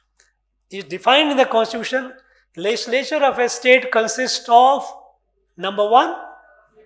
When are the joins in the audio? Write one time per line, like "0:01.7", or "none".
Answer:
none